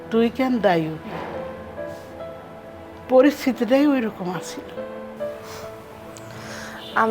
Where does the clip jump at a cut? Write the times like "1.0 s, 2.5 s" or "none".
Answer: 2.3 s